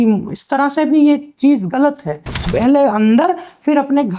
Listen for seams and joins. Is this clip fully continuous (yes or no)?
no